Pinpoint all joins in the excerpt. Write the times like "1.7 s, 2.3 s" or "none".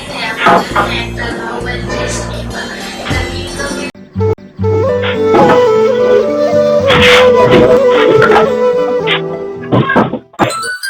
4.4 s